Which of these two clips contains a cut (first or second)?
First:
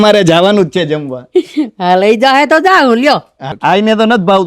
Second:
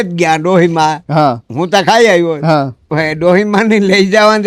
first